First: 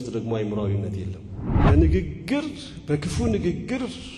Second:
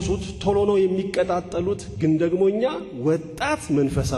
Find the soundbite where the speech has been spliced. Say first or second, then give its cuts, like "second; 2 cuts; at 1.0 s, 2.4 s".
first; 1 cut; at 1.5 s